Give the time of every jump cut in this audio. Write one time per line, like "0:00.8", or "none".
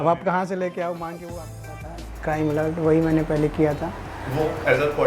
0:01.8